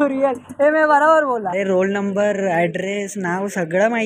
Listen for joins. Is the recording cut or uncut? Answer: cut